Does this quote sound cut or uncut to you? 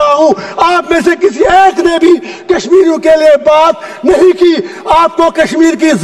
uncut